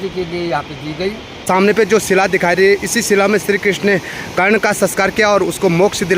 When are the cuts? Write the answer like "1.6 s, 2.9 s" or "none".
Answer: 1.3 s